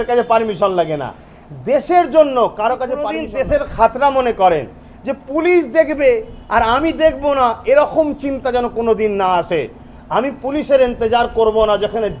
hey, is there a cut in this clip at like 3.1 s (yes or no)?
yes